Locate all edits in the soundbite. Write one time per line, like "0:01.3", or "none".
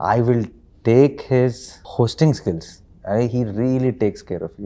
none